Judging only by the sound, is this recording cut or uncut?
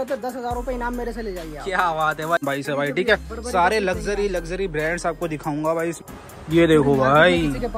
cut